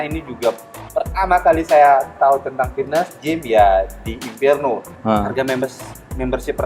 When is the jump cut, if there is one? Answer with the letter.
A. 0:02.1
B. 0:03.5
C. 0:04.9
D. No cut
C